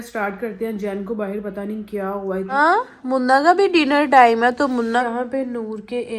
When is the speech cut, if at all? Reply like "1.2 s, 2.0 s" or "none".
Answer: 2.5 s, 5.0 s